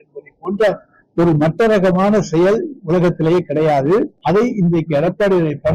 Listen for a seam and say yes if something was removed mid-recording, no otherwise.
yes